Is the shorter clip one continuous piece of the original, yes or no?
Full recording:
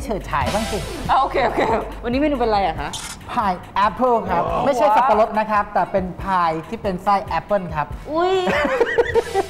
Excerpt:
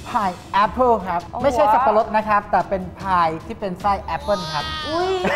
yes